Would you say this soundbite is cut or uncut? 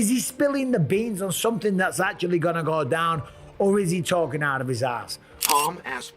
cut